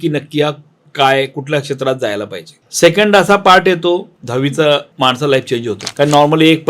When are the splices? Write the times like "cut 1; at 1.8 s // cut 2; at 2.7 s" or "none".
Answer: cut 1; at 2.6 s // cut 2; at 4.9 s